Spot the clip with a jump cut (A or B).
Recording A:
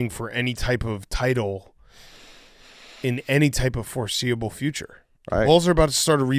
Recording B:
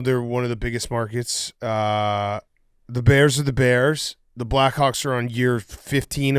A